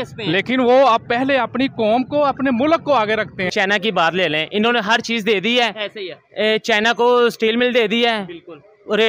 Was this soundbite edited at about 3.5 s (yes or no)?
yes